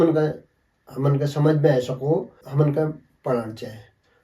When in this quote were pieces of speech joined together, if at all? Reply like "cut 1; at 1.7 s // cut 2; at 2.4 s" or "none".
cut 1; at 2.3 s